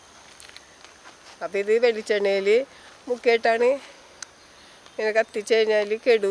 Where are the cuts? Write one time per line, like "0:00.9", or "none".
none